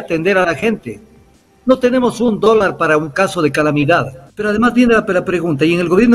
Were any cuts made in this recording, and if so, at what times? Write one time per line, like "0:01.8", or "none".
0:04.3